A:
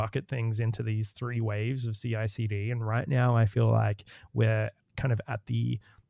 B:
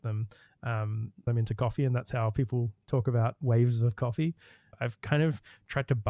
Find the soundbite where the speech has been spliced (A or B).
B